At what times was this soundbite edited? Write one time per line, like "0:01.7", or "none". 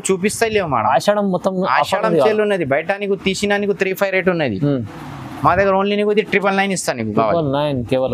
none